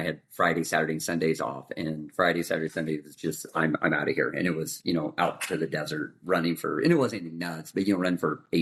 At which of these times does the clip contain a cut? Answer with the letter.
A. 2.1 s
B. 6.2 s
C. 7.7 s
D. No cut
D